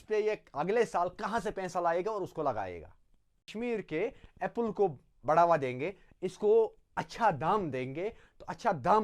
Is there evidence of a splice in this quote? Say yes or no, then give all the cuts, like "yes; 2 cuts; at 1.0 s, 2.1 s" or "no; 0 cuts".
yes; 1 cut; at 3.5 s